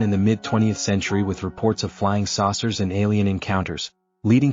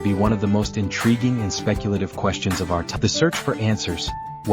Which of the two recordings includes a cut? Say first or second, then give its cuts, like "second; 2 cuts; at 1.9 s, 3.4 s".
second; 1 cut; at 3.0 s